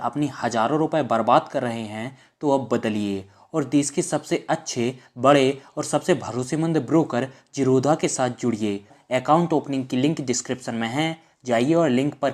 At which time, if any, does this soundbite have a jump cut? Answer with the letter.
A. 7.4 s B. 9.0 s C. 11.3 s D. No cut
B